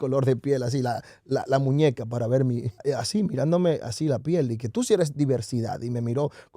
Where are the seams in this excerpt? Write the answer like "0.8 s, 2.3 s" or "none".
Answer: 2.8 s